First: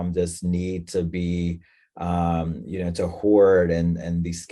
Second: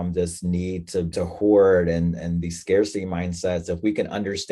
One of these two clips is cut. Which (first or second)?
second